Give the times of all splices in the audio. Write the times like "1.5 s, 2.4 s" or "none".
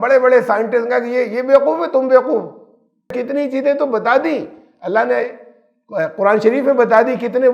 3.1 s